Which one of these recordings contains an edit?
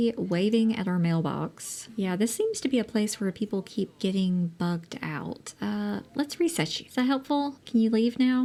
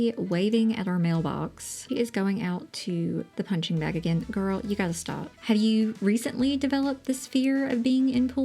second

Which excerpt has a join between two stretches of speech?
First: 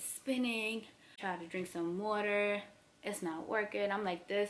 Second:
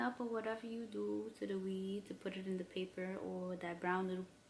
first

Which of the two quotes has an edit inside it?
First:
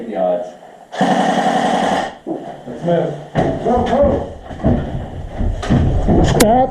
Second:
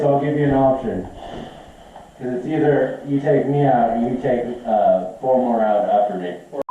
first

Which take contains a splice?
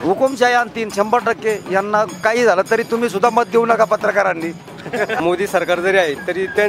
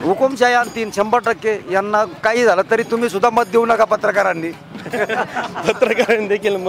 first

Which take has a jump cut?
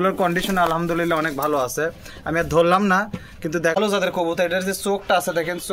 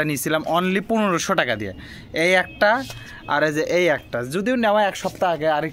first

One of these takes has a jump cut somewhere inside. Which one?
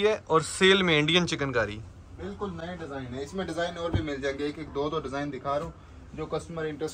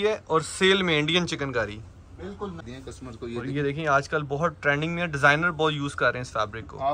second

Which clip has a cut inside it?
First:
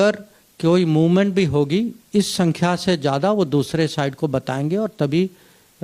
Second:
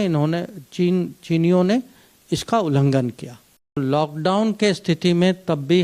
second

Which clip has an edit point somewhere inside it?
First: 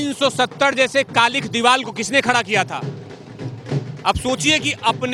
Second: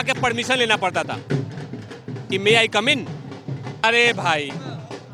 second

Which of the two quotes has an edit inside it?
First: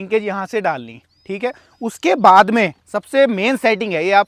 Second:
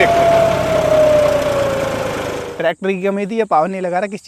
second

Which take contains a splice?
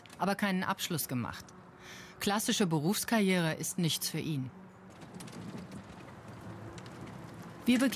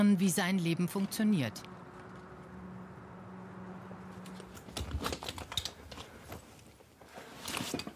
second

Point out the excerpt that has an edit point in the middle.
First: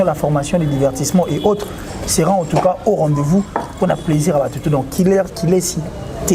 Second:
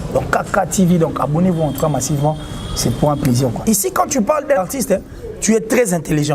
second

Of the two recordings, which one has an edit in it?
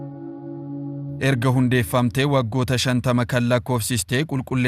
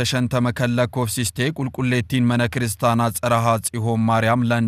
first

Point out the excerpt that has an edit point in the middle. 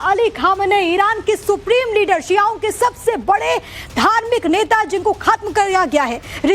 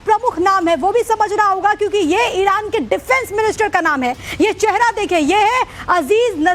first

